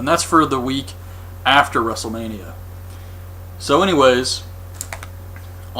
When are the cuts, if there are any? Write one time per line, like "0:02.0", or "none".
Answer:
0:01.6